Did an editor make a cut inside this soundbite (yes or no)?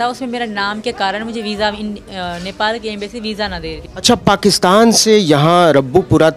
yes